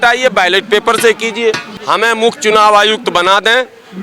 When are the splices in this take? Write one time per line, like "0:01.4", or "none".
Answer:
0:01.7